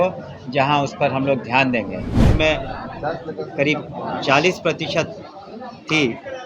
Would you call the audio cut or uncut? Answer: cut